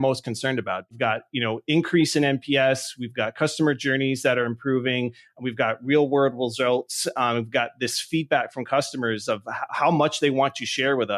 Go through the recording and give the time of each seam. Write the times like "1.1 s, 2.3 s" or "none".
0.9 s